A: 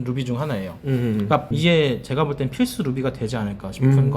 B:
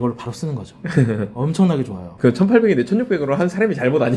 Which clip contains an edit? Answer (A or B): A